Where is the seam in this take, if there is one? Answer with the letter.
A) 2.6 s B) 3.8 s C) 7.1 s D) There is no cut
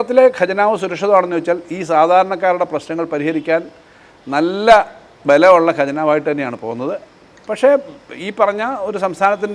D